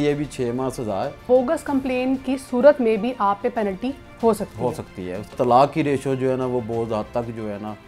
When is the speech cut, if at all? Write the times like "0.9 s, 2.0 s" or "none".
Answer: 1.2 s, 5.3 s